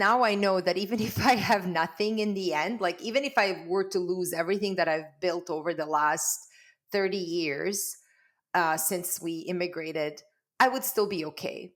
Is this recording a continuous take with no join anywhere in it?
yes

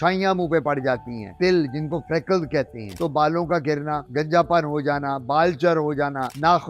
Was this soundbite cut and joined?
yes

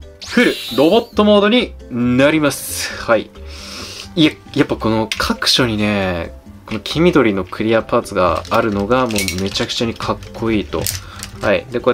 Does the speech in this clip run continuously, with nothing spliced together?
yes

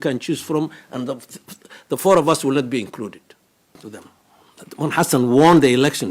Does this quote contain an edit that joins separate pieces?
yes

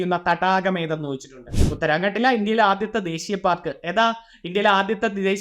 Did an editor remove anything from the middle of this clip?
yes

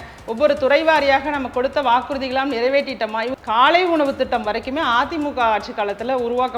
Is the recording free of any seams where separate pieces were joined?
no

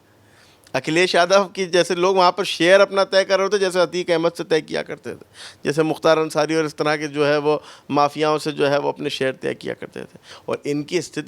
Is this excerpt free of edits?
no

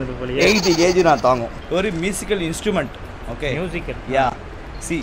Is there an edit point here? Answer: yes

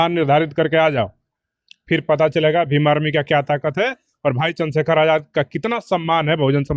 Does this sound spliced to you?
no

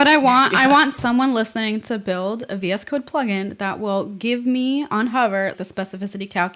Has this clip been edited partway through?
yes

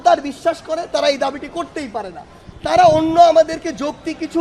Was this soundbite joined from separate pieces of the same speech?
no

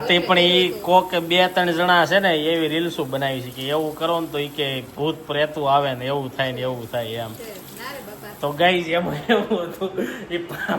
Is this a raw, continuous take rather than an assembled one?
yes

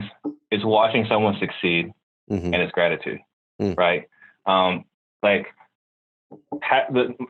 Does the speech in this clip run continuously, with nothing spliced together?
yes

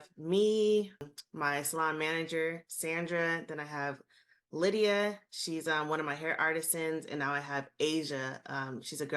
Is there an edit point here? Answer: yes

